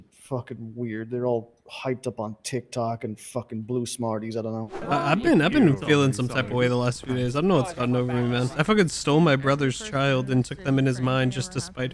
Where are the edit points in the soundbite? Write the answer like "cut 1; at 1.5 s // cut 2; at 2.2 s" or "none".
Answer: cut 1; at 4.8 s // cut 2; at 8.5 s